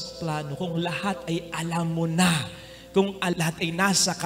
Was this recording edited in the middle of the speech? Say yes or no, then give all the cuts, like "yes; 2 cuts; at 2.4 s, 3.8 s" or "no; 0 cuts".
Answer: yes; 1 cut; at 3.3 s